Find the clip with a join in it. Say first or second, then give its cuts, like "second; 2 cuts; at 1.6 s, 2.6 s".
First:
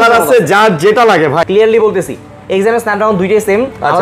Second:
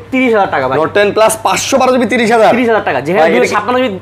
first; 1 cut; at 1.4 s